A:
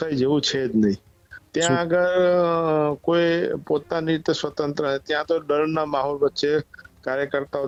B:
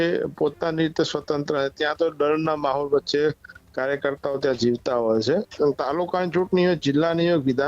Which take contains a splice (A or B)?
B